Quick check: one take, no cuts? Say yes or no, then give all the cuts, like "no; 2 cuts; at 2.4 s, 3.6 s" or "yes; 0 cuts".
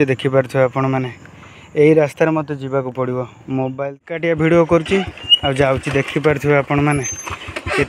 no; 1 cut; at 3.7 s